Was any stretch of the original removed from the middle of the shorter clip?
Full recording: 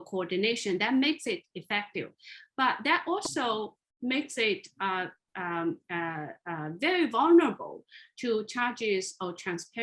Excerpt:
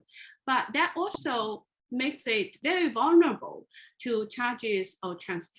yes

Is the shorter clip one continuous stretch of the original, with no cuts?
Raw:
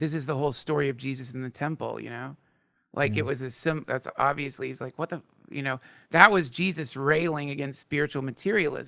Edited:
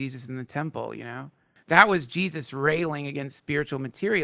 no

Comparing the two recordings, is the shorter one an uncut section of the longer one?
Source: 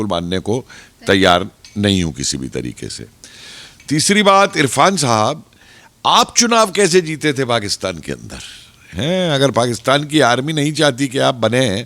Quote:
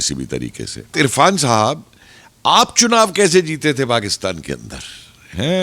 no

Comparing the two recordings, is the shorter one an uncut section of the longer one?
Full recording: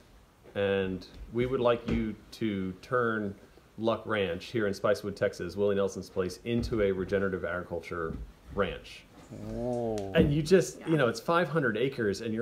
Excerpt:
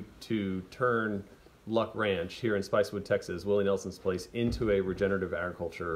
yes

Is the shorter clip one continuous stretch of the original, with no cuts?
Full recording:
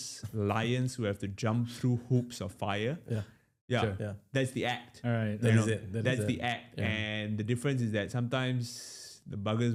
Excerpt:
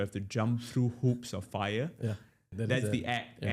no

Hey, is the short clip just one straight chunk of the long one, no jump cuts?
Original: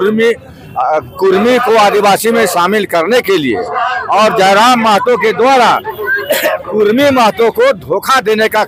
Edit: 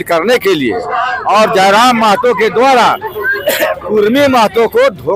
yes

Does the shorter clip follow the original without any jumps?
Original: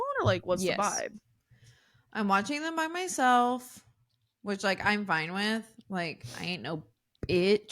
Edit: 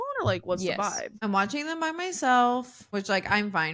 no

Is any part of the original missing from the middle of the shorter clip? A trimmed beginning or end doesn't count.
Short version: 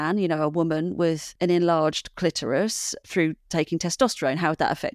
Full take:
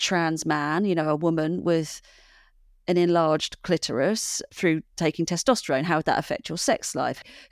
yes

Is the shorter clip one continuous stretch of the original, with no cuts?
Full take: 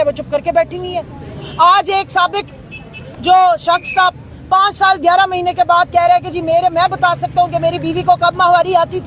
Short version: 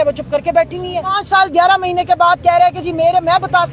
no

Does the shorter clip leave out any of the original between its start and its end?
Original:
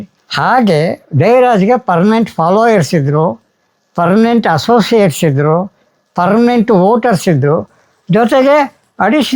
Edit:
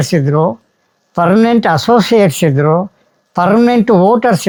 no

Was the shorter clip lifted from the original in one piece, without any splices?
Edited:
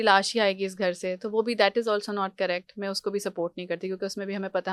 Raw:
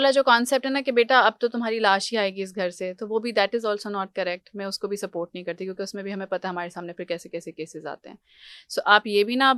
yes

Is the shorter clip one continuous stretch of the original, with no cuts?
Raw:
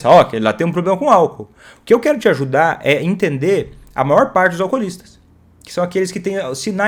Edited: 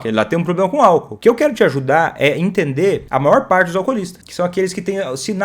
no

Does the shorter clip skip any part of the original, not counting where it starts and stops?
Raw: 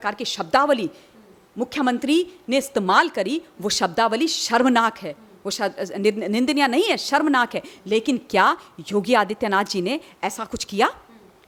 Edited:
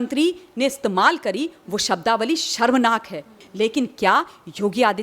yes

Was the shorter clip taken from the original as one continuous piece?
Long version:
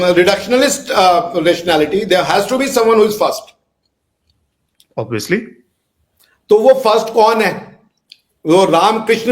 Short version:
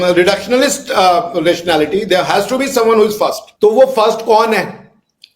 no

